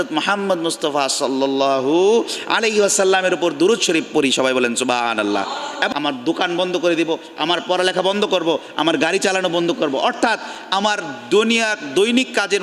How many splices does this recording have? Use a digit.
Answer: 1